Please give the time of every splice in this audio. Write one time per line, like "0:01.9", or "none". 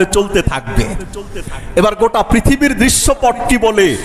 none